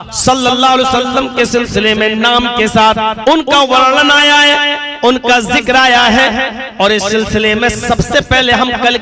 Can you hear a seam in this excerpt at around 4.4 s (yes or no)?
no